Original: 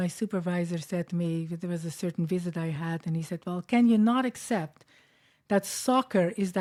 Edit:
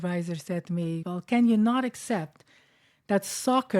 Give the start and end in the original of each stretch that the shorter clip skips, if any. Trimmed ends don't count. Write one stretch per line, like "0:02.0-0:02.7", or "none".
0:01.5-0:03.4